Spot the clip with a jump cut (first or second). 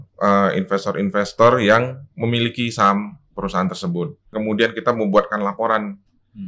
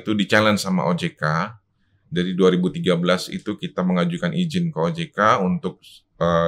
first